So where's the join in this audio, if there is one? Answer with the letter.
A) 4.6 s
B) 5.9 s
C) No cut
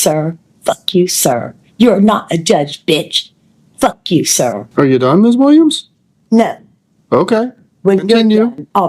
A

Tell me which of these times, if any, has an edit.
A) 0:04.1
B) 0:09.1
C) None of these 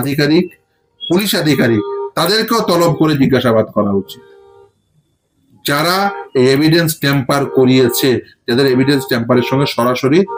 C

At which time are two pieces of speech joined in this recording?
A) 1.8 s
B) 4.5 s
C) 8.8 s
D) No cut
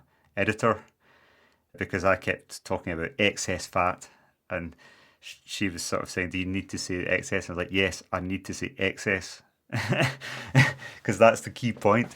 A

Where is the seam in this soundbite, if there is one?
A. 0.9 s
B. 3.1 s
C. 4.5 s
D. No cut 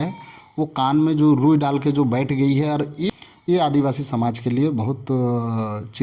B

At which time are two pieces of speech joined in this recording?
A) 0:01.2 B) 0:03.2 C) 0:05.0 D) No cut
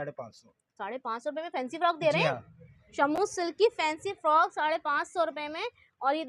D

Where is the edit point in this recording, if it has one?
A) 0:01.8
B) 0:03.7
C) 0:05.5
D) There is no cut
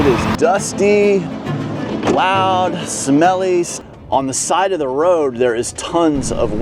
B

